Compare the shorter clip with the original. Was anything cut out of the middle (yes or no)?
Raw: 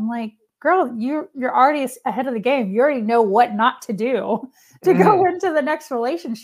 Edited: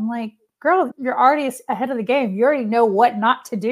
yes